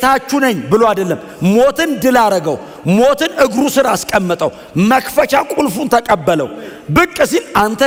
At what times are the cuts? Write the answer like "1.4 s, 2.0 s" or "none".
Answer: none